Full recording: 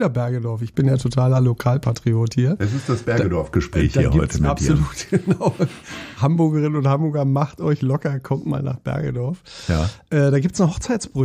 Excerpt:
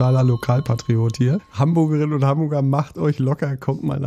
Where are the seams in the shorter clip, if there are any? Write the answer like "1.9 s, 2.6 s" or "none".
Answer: 1.5 s